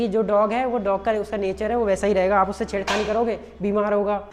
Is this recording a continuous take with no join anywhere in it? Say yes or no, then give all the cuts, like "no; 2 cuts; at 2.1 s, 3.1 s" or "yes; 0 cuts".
yes; 0 cuts